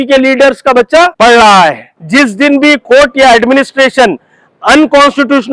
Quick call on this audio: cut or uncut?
cut